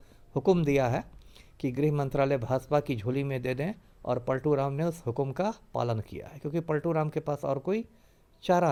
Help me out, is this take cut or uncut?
uncut